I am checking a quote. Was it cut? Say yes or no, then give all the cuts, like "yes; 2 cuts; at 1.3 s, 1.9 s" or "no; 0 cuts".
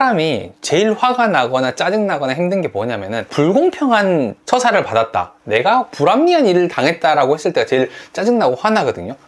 no; 0 cuts